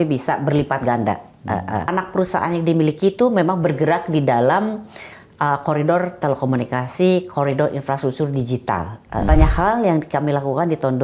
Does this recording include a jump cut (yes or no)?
yes